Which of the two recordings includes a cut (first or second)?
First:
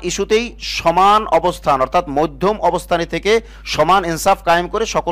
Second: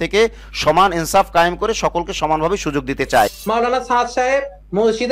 second